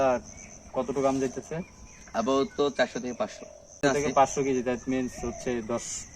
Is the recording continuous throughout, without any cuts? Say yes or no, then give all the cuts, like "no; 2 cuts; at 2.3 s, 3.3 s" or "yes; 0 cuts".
no; 1 cut; at 3.8 s